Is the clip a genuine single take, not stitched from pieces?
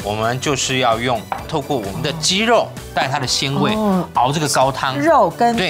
no; 1 cut; at 1.5 s

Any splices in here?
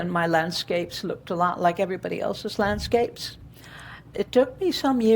yes; 1 cut; at 4.1 s

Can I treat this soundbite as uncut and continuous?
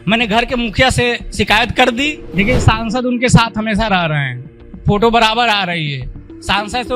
no; 1 cut; at 2.2 s

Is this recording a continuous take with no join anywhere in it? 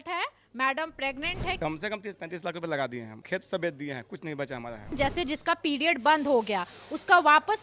no; 3 cuts; at 1.6 s, 3.1 s, 4.9 s

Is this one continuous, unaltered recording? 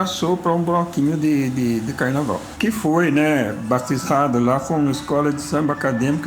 no; 1 cut; at 2.5 s

